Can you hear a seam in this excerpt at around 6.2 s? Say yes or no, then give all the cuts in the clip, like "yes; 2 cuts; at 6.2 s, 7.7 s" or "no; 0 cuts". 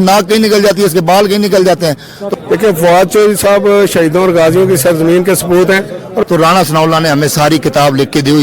yes; 2 cuts; at 2.1 s, 6.2 s